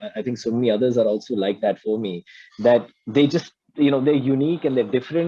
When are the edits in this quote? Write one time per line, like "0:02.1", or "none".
none